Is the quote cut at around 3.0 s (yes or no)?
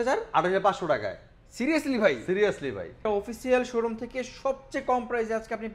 yes